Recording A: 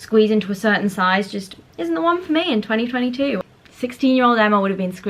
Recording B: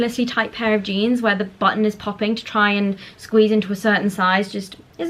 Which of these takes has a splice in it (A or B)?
A